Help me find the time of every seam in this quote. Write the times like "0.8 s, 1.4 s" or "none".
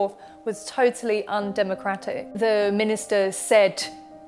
2.3 s